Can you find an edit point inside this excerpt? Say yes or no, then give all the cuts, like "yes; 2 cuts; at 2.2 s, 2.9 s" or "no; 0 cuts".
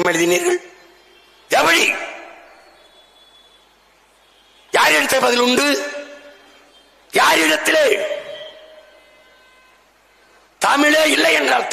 no; 0 cuts